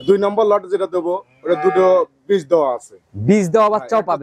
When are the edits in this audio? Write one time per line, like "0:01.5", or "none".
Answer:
none